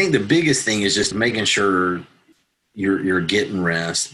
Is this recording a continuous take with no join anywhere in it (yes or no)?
no